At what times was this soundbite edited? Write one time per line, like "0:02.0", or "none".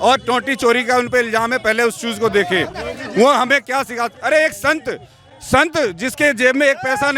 none